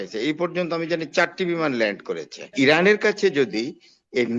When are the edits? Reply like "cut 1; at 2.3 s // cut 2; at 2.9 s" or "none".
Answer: cut 1; at 2.5 s